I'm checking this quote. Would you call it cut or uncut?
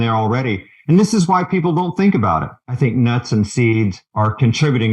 cut